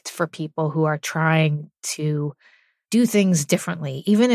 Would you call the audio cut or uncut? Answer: uncut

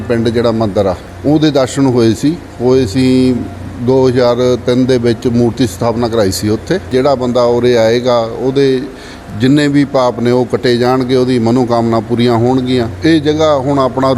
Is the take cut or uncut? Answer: cut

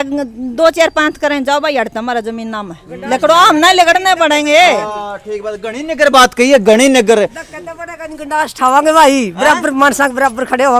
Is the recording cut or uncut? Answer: uncut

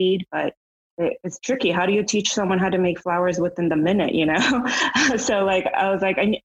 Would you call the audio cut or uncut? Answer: uncut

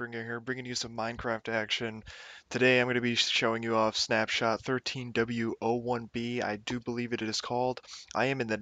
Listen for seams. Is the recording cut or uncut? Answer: uncut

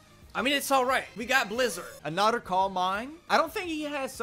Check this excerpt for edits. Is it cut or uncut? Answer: cut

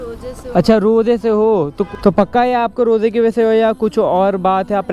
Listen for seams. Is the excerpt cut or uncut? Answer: cut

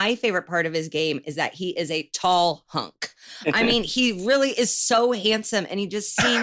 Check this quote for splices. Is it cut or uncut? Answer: uncut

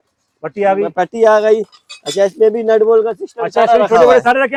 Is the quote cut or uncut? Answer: uncut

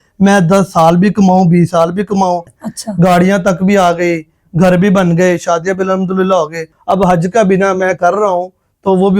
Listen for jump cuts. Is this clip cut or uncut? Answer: cut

